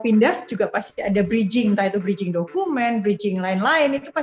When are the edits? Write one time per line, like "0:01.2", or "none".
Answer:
none